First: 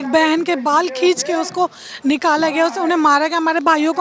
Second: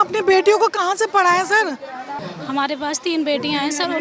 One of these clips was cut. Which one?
second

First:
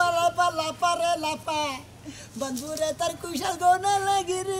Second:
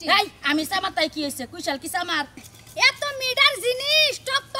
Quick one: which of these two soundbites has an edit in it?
second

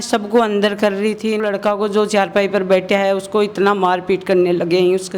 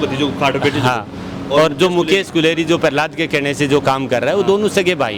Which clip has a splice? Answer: first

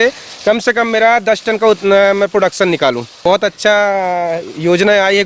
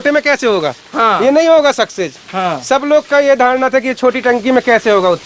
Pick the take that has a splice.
first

